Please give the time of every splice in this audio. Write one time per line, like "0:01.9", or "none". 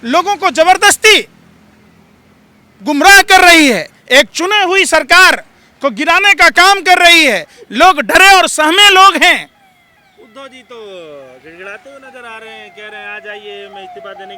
none